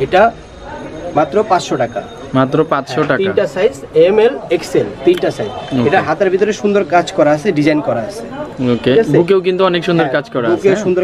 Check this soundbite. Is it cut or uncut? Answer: uncut